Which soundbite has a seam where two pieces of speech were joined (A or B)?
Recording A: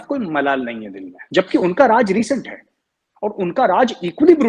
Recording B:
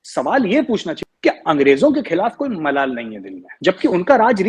B